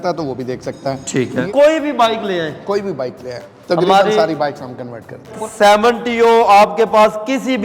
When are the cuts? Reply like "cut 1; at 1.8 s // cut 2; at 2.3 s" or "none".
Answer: cut 1; at 1.4 s // cut 2; at 5.3 s